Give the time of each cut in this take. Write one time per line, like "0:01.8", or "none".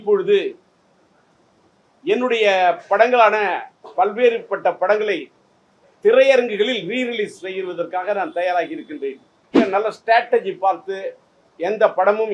0:09.5